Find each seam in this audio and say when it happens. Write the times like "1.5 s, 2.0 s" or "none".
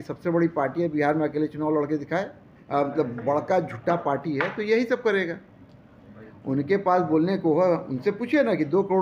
2.6 s